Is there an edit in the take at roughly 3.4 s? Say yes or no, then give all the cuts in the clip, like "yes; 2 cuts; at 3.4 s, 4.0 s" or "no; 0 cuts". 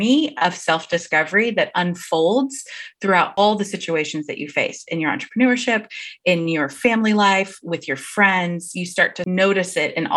yes; 2 cuts; at 3.4 s, 9.2 s